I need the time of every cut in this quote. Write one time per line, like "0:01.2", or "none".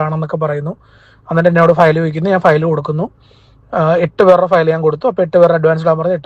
none